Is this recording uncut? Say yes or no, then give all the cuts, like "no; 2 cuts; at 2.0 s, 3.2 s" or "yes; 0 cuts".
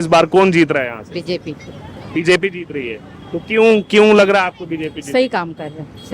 yes; 0 cuts